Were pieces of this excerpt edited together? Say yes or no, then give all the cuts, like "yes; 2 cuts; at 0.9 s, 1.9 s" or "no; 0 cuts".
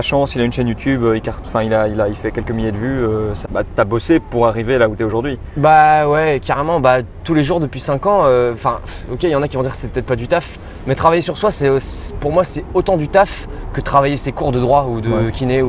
yes; 1 cut; at 3.4 s